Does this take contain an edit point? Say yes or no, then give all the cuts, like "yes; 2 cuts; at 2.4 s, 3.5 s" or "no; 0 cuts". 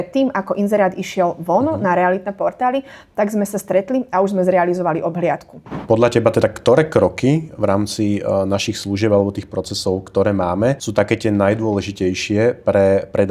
yes; 2 cuts; at 5.7 s, 10.8 s